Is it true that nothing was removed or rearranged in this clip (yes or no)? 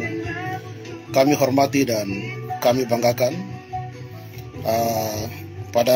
yes